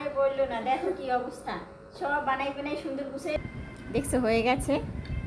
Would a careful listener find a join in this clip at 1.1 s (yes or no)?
no